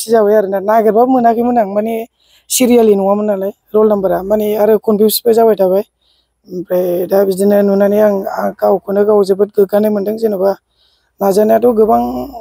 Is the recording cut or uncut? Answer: uncut